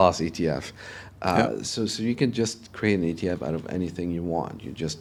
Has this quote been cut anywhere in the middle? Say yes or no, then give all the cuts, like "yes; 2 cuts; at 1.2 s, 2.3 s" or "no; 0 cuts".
no; 0 cuts